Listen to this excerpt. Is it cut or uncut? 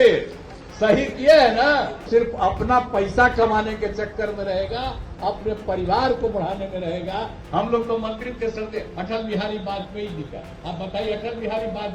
cut